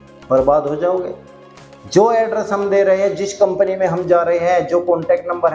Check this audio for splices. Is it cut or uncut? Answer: uncut